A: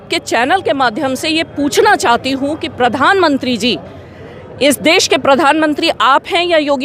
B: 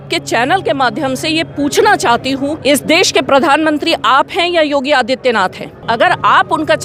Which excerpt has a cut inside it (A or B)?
B